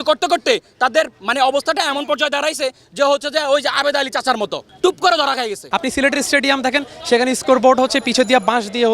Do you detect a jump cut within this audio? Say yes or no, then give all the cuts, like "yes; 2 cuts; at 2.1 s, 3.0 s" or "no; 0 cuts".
yes; 2 cuts; at 4.6 s, 5.6 s